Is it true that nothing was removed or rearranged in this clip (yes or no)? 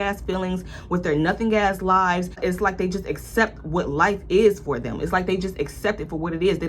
no